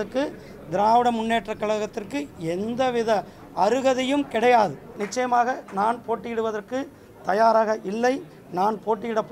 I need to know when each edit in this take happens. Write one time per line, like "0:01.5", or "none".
0:05.0